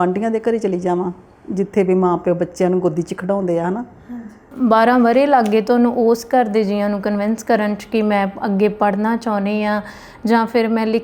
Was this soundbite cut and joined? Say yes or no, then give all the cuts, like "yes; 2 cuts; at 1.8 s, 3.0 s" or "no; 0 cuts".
yes; 1 cut; at 4.5 s